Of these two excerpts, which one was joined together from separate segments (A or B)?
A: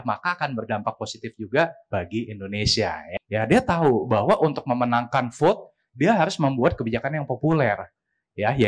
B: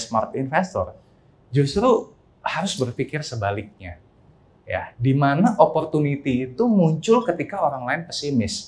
A